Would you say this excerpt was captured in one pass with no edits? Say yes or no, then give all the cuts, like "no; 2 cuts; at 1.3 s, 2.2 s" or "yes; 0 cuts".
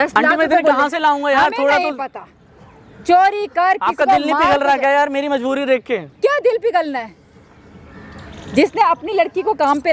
yes; 0 cuts